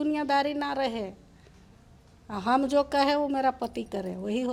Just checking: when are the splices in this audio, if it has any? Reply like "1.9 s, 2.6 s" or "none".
none